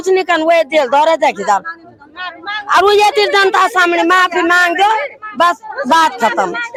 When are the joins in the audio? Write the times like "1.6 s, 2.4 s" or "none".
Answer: none

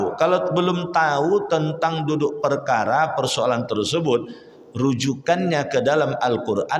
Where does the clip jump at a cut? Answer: none

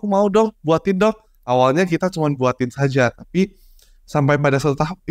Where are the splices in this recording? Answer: none

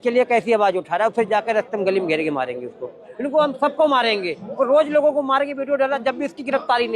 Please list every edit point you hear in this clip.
3.1 s

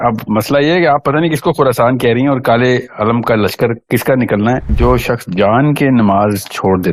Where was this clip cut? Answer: 4.7 s

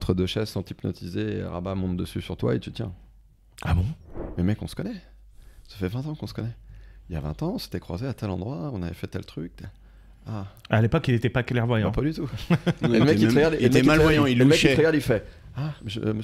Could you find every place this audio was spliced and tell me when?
4.1 s

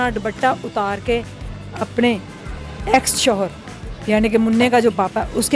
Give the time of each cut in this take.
none

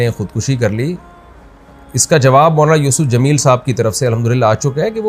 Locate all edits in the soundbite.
none

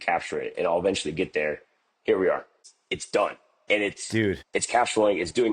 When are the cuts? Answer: 2.6 s

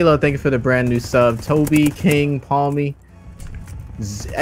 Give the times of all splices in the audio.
none

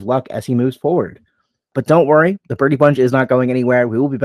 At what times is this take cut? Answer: 1.7 s

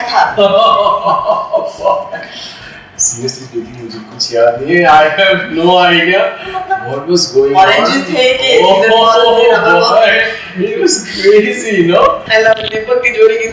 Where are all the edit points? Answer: 12.2 s

